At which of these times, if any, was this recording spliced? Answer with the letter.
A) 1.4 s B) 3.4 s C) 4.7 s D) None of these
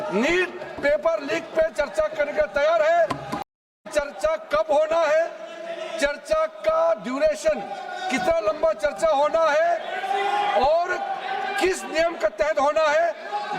B